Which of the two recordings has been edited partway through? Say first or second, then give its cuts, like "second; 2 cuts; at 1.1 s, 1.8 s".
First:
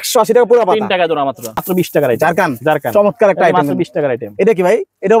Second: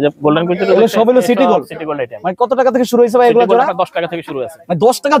first; 1 cut; at 1.7 s